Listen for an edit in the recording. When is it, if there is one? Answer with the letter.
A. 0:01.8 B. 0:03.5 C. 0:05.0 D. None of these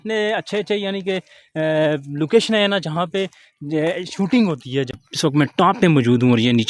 C